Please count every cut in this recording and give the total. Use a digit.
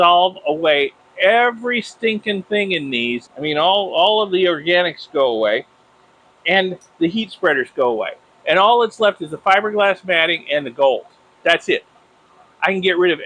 1